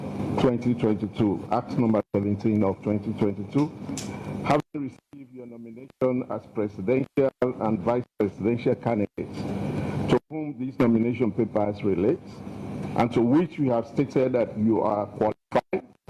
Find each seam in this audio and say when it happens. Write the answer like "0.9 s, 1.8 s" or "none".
none